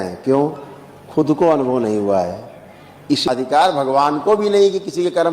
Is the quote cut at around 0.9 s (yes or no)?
no